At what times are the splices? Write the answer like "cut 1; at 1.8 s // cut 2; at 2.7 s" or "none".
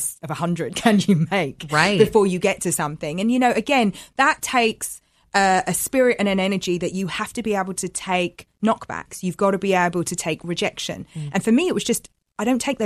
none